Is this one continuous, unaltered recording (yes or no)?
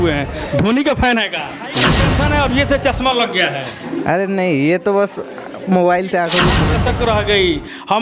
no